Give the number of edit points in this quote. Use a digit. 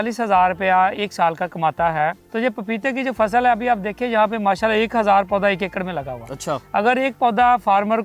1